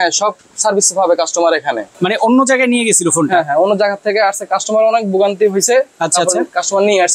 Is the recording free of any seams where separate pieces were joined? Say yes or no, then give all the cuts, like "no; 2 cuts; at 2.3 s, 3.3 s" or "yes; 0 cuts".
no; 1 cut; at 1.9 s